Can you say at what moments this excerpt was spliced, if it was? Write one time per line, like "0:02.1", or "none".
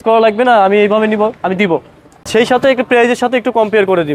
none